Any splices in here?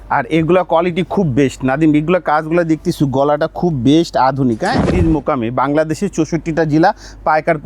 yes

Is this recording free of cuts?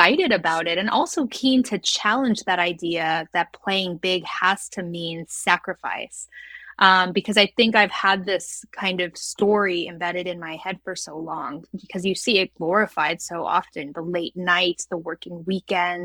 yes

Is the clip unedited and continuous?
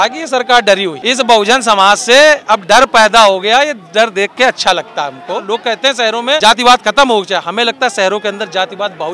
no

